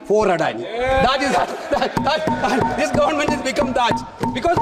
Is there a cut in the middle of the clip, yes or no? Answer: no